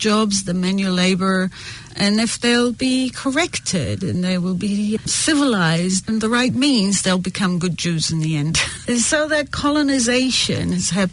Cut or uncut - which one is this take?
cut